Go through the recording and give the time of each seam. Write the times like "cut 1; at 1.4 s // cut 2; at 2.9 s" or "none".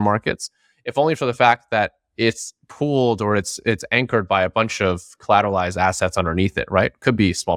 none